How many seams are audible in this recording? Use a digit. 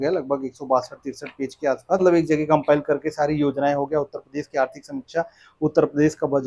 1